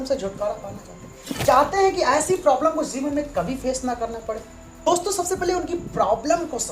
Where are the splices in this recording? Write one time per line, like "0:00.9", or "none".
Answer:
0:04.9